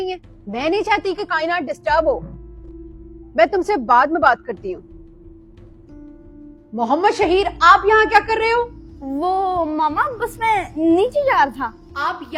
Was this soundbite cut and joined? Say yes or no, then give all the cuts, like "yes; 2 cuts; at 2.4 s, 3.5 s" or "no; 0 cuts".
no; 0 cuts